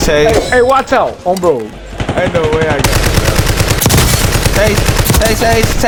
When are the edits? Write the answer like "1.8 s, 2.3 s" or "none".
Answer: none